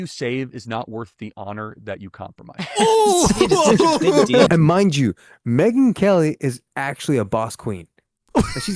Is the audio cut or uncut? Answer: cut